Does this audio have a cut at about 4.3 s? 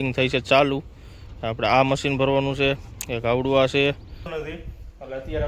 yes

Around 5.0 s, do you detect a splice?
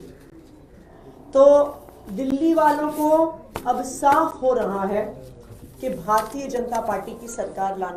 no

